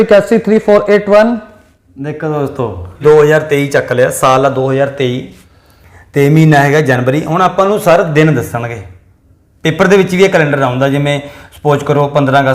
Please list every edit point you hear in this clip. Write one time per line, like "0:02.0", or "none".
0:03.0